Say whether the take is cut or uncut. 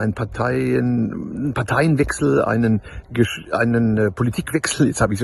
uncut